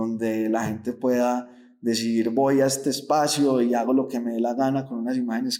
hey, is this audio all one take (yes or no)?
yes